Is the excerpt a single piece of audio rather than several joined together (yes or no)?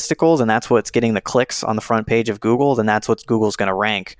yes